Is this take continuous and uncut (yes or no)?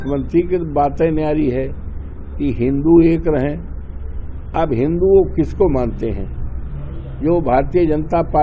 yes